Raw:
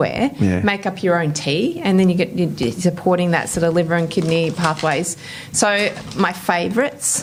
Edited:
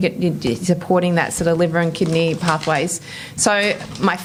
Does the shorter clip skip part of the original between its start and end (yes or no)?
no